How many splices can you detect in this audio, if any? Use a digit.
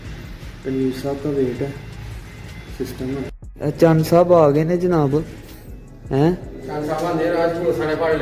1